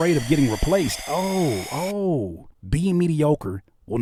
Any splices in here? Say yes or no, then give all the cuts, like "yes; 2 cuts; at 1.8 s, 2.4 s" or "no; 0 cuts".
no; 0 cuts